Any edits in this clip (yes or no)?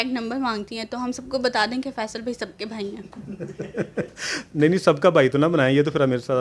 no